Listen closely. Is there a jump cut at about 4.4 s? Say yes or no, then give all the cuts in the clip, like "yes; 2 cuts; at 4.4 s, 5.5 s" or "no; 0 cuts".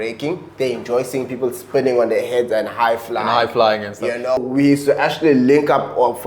yes; 1 cut; at 4.4 s